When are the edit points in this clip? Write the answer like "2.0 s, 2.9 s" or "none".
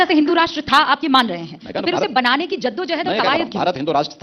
none